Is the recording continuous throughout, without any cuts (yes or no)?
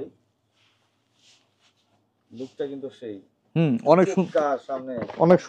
yes